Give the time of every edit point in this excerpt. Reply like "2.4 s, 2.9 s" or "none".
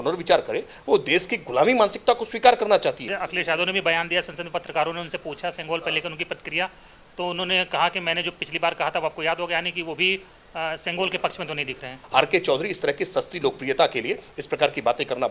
3.2 s, 11.9 s